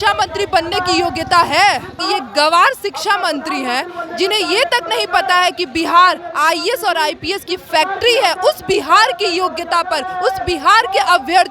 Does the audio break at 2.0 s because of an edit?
yes; 1 cut; at 2.0 s

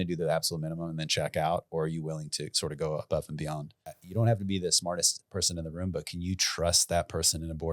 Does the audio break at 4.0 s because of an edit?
yes; 1 cut; at 4.0 s

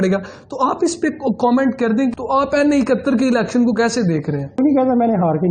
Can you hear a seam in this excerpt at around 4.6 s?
yes; 2 cuts; at 2.1 s, 4.6 s

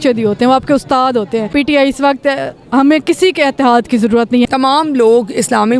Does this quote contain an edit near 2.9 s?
no; 2 cuts; at 1.5 s, 4.5 s

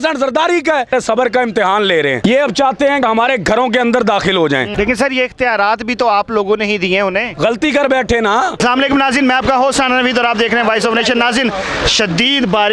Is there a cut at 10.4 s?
no; 5 cuts; at 0.9 s, 2.2 s, 3.0 s, 4.7 s, 8.5 s

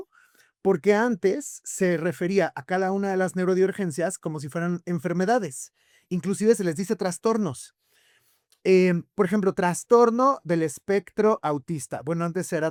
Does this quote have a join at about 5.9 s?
no; 0 cuts

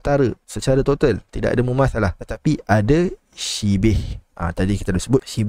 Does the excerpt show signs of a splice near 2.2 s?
yes; 1 cut; at 2.2 s

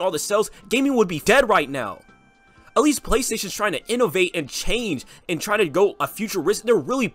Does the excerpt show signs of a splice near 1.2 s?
yes; 1 cut; at 1.2 s

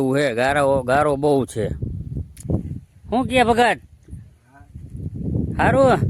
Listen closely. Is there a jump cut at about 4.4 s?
no; 1 cut; at 2.3 s

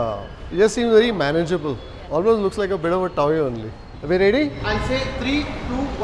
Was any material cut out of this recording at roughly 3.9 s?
yes; 1 cut; at 3.9 s

